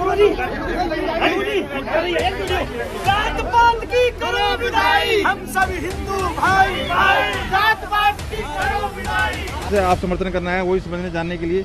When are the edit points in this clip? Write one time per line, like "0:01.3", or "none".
0:09.7